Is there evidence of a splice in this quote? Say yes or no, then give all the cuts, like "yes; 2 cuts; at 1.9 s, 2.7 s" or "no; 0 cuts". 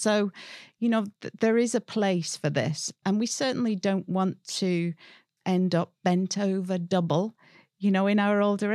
no; 0 cuts